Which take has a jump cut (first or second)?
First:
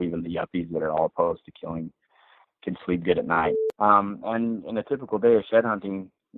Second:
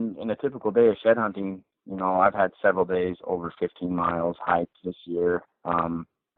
first